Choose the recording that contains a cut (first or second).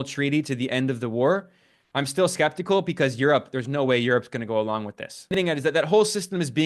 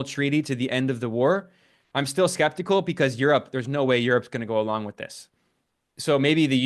first